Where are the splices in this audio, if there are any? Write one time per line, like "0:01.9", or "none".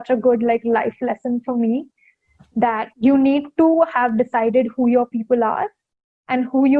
0:02.9